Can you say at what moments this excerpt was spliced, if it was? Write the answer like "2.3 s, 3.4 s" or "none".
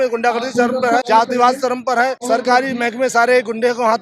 1.1 s, 2.2 s